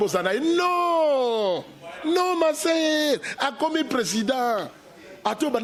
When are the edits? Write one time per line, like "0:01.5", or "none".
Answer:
none